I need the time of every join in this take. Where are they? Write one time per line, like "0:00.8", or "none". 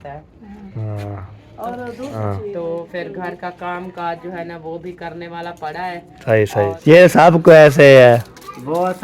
0:02.2
0:06.8